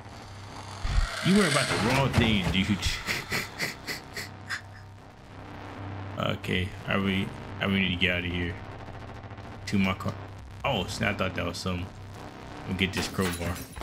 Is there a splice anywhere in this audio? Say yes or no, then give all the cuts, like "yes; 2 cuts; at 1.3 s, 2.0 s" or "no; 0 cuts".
no; 0 cuts